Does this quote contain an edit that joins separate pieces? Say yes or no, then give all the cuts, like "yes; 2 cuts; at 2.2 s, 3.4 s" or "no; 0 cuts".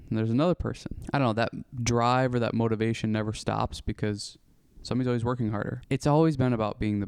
yes; 2 cuts; at 0.9 s, 5.8 s